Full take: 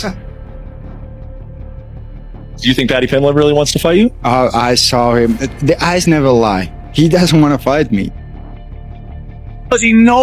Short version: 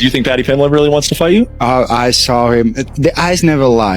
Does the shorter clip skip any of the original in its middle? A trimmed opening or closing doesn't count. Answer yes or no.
no